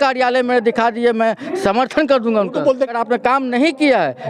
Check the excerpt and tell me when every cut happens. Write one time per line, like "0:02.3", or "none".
0:02.9